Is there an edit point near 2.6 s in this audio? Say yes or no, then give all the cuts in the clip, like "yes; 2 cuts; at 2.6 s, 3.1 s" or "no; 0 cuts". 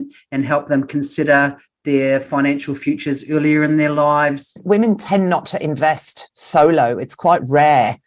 no; 1 cut; at 4.6 s